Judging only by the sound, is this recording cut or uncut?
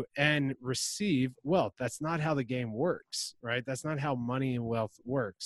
uncut